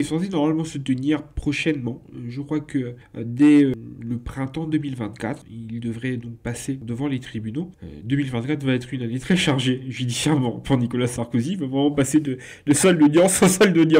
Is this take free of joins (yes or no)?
no